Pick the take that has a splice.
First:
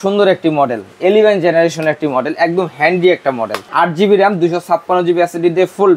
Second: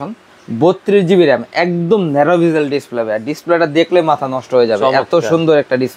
first; 1 cut; at 3.6 s

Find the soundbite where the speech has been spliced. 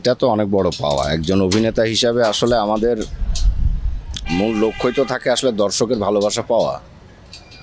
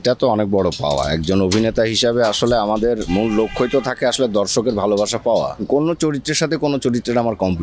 second; 2 cuts; at 3.0 s, 5.6 s

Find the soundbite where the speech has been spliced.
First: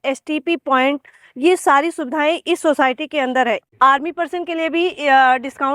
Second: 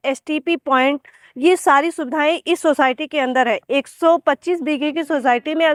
first; 1 cut; at 3.6 s

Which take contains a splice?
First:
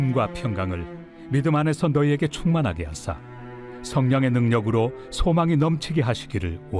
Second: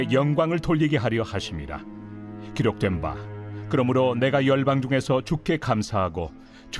second; 1 cut; at 2.1 s

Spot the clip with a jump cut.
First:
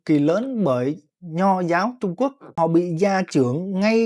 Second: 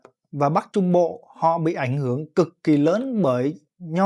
first; 1 cut; at 2.5 s

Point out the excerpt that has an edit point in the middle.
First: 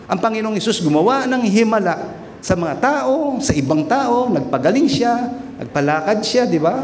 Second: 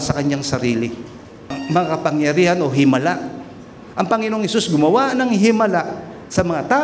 second; 1 cut; at 1.6 s

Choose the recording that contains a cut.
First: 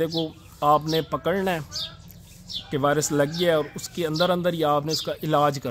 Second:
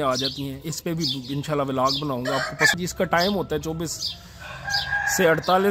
second; 1 cut; at 2.7 s

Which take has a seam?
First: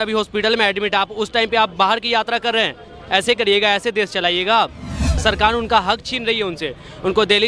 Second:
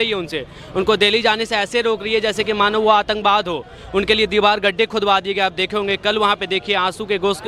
first; 1 cut; at 5.1 s

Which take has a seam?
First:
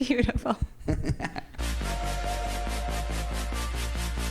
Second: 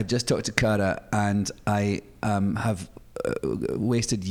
first; 1 cut; at 1.6 s

